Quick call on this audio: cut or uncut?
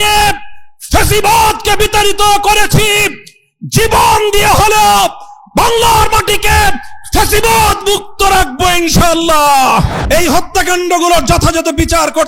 cut